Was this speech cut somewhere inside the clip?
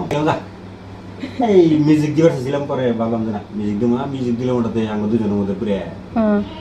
no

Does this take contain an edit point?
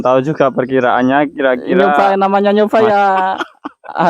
yes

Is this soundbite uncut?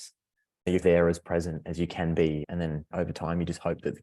no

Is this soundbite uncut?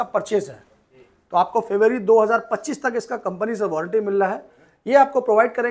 yes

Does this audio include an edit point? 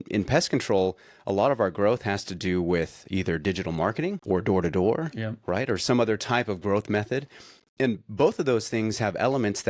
yes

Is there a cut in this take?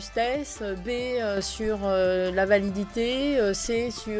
no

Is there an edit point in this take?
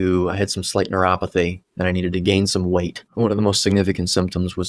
yes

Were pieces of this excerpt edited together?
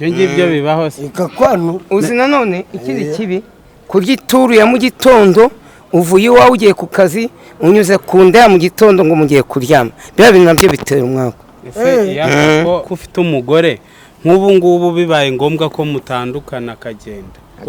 no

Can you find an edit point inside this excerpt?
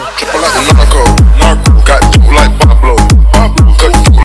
no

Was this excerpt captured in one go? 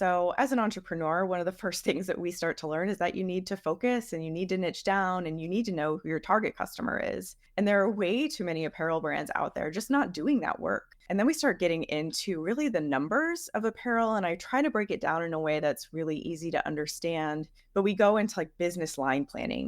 no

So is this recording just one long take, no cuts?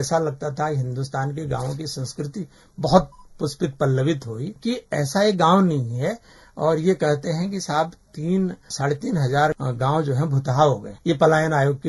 no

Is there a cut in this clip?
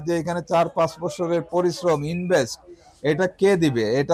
no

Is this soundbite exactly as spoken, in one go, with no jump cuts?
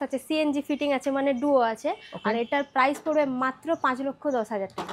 yes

